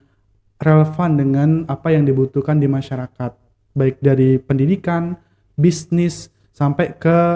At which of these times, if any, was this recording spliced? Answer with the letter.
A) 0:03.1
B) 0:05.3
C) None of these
C